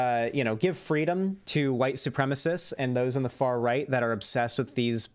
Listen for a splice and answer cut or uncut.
uncut